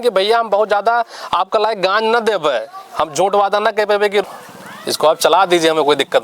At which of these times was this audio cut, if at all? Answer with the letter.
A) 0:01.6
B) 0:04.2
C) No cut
B